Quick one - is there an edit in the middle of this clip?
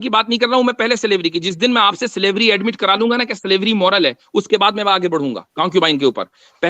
yes; 1 cut; at 5.4 s

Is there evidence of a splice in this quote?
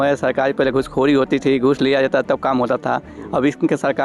no; 0 cuts

